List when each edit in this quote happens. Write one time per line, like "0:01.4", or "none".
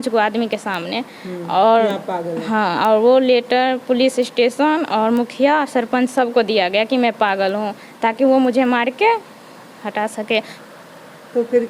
0:10.6